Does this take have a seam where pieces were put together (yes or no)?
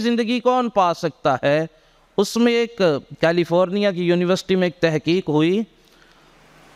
no